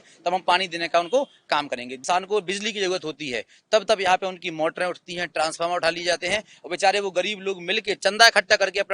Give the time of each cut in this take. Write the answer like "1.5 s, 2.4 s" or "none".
2.0 s